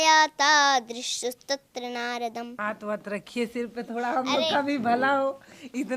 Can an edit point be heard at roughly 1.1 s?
no; 1 cut; at 2.5 s

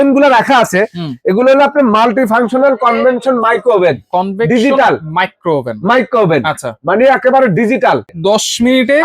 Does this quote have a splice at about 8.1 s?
yes; 1 cut; at 8.1 s

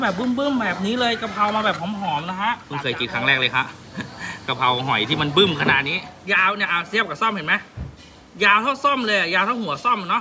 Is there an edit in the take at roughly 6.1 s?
yes; 2 cuts; at 2.6 s, 6.1 s

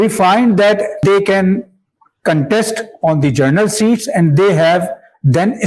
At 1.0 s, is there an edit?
yes; 1 cut; at 1.0 s

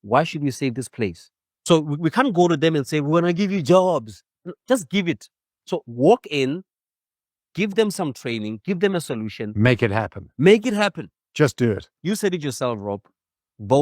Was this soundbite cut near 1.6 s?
yes; 1 cut; at 1.6 s

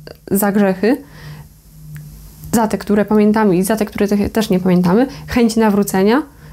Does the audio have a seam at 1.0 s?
no; 0 cuts

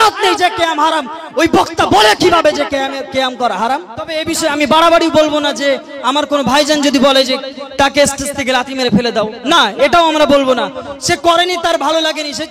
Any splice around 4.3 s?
yes; 1 cut; at 4.3 s

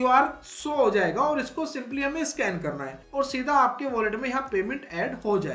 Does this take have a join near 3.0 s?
yes; 1 cut; at 3.0 s

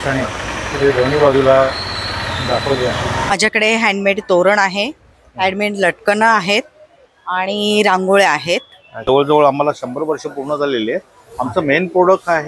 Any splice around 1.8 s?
no; 2 cuts; at 3.3 s, 9.0 s

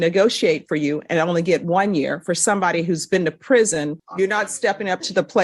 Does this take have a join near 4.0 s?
yes; 1 cut; at 4.0 s

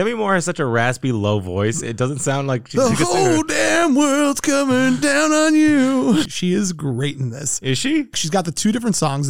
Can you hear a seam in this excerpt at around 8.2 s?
yes; 2 cuts; at 6.3 s, 8.2 s

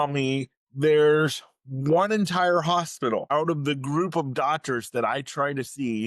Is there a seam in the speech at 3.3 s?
yes; 1 cut; at 3.3 s

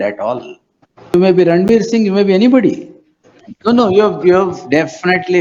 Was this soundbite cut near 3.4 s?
yes; 2 cuts; at 1.1 s, 3.4 s

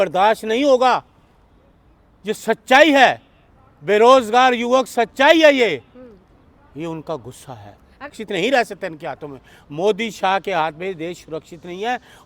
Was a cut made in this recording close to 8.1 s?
yes; 1 cut; at 8.1 s

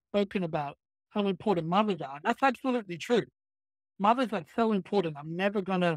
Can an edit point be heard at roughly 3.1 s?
no; 0 cuts

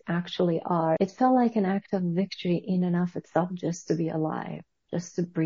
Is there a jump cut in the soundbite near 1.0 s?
yes; 1 cut; at 1.0 s

